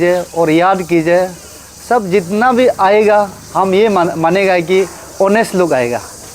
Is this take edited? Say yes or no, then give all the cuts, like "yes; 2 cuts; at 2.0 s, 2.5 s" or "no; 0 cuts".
no; 0 cuts